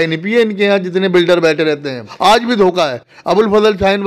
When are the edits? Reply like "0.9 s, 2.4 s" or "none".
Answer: 2.1 s